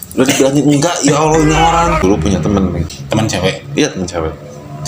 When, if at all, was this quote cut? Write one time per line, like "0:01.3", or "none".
0:02.0
0:02.9